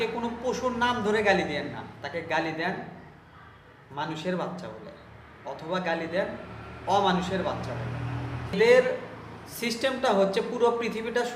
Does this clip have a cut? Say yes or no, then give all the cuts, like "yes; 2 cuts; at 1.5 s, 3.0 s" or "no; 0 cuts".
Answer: yes; 1 cut; at 8.6 s